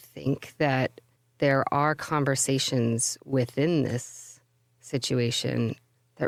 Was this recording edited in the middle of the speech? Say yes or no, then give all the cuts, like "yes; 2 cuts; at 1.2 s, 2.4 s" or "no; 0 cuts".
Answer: no; 0 cuts